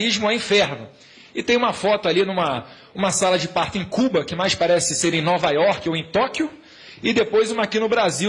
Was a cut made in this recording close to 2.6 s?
yes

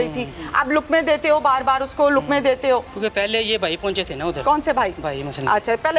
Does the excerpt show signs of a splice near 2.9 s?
yes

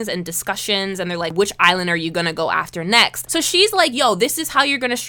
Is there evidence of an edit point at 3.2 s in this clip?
yes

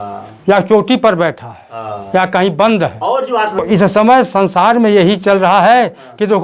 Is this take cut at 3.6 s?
yes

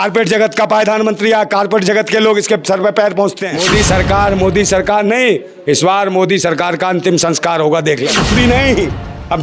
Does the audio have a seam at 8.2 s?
yes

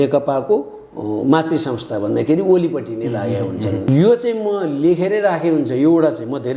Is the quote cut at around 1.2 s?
no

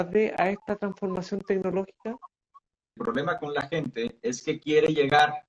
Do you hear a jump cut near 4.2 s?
no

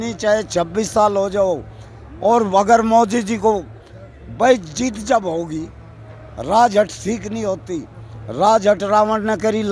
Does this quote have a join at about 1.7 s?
no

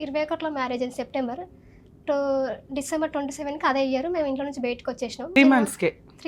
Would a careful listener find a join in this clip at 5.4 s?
yes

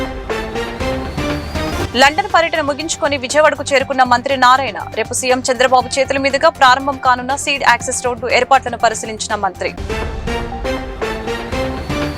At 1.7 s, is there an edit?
yes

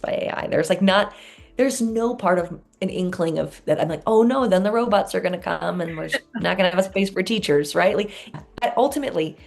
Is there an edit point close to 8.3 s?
yes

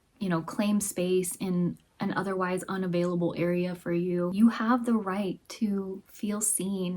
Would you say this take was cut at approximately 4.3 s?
yes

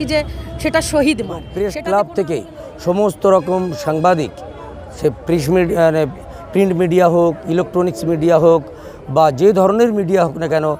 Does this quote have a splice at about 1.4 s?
yes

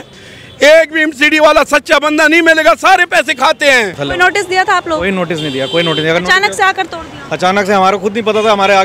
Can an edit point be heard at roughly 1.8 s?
no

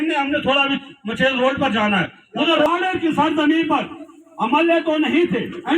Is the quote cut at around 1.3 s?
no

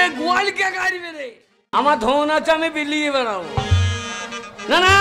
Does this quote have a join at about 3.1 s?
no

